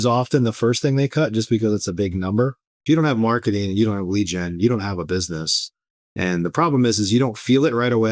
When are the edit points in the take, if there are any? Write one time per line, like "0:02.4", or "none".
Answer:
0:02.7